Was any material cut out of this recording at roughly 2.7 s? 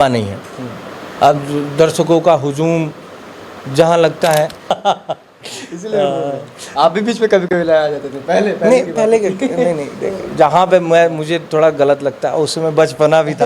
no; 1 cut; at 4.8 s

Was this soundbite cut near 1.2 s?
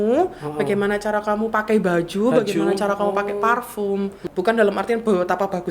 no; 1 cut; at 4.2 s

